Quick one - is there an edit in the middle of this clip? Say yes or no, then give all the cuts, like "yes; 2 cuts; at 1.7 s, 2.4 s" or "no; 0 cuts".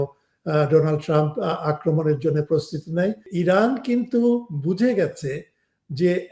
yes; 1 cut; at 3.3 s